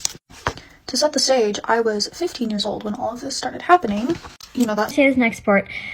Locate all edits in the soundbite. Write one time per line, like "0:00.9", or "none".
0:04.9